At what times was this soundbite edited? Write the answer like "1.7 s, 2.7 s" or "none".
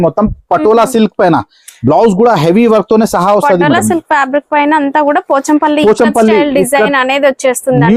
none